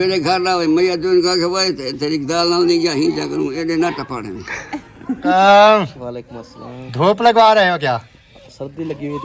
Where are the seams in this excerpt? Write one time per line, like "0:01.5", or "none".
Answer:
0:05.2